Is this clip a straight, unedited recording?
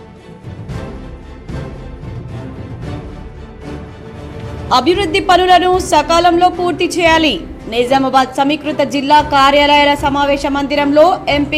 no; 1 cut; at 4.2 s

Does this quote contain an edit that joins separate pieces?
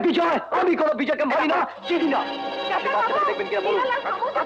no; 0 cuts

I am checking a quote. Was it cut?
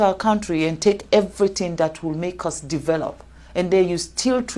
no; 0 cuts

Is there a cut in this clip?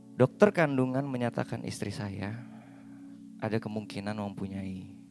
no; 0 cuts

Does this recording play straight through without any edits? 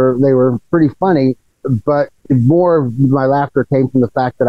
no; 1 cut; at 1.5 s

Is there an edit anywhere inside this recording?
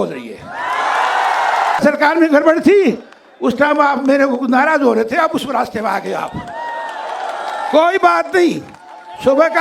yes; 1 cut; at 1.8 s

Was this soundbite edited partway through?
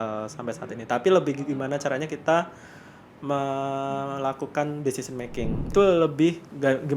yes; 1 cut; at 5.6 s

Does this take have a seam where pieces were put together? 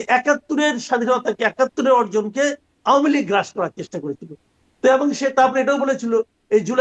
no; 0 cuts

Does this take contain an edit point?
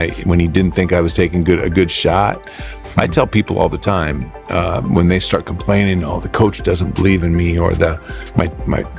no; 0 cuts

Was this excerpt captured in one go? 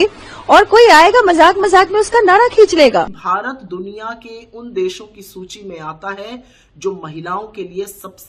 no; 1 cut; at 3.1 s

